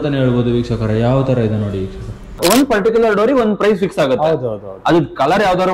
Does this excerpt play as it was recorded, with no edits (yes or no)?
no